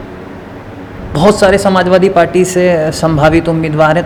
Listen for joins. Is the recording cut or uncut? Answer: uncut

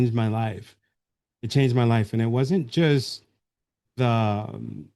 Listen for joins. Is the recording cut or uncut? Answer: uncut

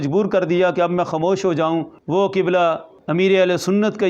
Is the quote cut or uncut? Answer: cut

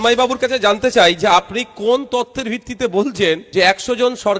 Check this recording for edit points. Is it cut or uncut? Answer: cut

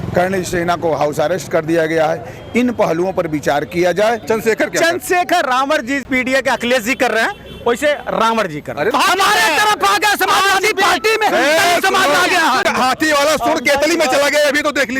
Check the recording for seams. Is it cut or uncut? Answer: cut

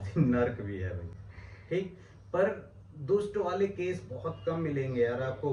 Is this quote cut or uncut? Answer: uncut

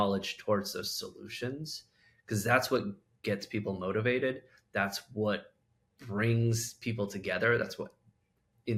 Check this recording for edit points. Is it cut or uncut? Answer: uncut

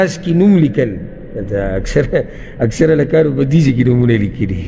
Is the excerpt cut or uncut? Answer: uncut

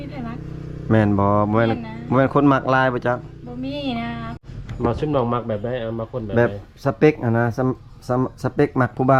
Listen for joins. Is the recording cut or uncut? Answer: cut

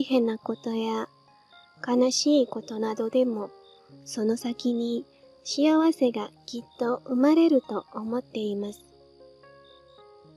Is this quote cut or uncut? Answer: cut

